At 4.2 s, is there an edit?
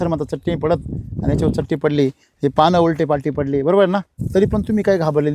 yes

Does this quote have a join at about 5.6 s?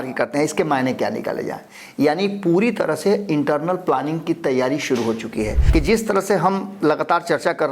yes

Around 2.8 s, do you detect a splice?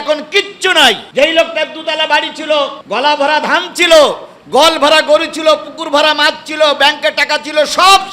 yes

